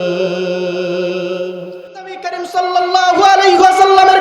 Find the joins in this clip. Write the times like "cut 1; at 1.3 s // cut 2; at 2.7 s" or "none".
cut 1; at 2.2 s